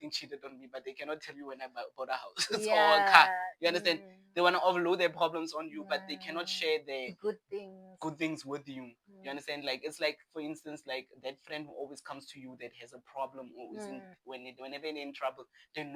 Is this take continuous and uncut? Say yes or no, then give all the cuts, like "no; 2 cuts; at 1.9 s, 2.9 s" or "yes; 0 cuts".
yes; 0 cuts